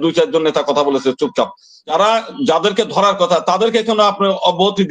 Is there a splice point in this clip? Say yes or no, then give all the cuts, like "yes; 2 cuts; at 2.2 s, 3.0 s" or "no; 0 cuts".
yes; 1 cut; at 1.8 s